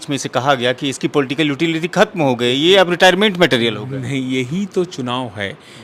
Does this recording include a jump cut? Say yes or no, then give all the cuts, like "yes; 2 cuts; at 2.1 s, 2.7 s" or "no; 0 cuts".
no; 0 cuts